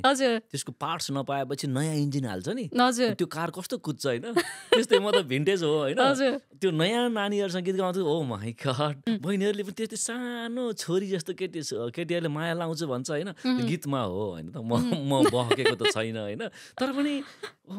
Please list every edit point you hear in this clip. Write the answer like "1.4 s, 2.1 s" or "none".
9.0 s